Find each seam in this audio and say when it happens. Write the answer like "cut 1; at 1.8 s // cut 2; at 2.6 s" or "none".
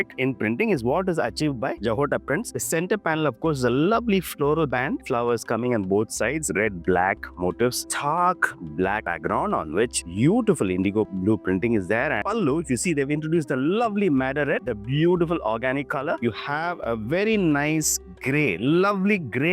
cut 1; at 2.5 s // cut 2; at 7.9 s // cut 3; at 12.2 s // cut 4; at 16.2 s